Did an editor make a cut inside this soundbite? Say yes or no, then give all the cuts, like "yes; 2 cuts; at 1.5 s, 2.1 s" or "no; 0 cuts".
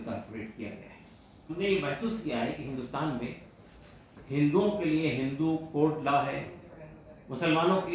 yes; 1 cut; at 1.6 s